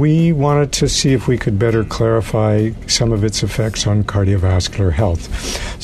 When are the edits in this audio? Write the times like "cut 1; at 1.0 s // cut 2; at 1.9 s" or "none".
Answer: none